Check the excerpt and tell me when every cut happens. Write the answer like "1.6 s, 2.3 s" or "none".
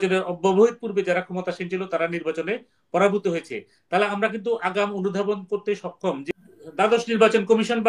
6.3 s